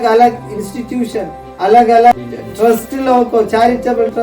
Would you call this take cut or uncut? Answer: cut